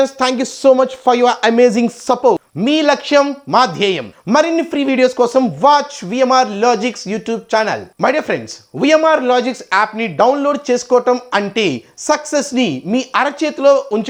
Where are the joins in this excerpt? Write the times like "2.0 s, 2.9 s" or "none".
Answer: none